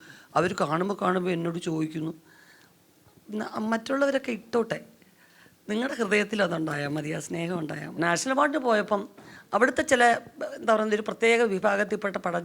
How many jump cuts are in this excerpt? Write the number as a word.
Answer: one